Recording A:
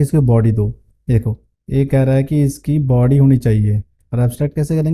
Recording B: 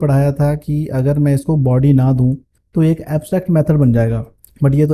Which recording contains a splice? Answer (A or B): A